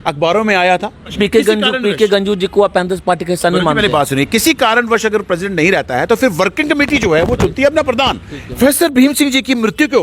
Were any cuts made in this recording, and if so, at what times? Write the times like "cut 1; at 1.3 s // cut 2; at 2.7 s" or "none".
cut 1; at 1.1 s // cut 2; at 8.6 s